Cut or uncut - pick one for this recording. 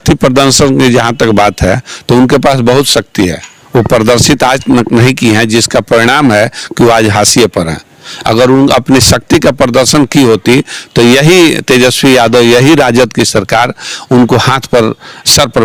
uncut